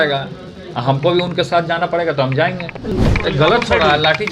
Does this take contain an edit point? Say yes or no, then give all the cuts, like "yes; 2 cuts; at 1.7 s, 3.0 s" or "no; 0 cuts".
yes; 1 cut; at 2.9 s